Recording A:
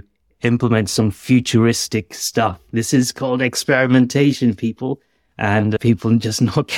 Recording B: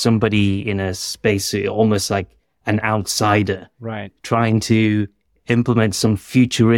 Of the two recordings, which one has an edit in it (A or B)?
A